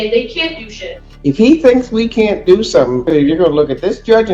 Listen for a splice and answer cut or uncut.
cut